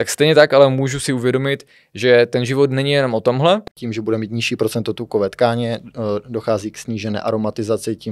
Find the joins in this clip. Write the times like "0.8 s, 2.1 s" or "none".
3.8 s